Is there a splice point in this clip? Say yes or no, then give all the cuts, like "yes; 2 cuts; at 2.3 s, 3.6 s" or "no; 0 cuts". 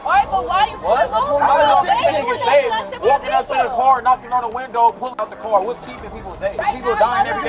no; 0 cuts